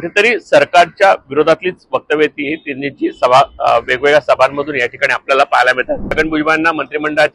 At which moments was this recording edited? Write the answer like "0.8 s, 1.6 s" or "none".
6.1 s